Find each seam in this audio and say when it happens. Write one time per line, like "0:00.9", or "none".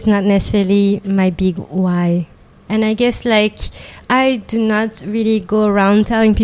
0:02.5
0:04.0